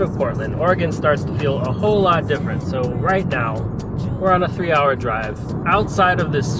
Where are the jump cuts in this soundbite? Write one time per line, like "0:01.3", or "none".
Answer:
none